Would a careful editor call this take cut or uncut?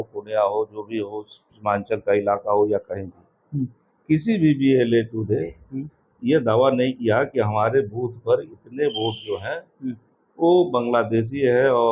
uncut